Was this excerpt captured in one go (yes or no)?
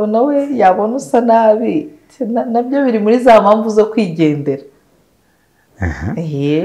yes